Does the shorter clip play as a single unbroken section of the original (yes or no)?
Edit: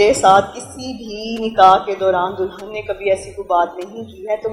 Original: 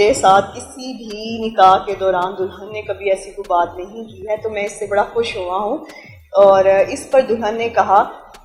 yes